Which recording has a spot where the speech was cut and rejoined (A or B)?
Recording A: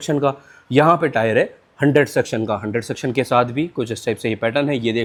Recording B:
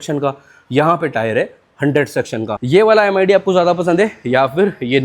B